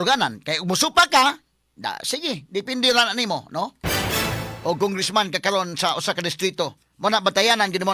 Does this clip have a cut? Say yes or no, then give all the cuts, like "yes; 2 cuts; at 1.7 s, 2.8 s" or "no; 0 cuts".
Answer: no; 0 cuts